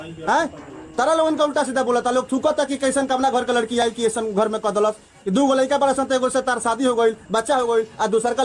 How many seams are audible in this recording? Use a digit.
0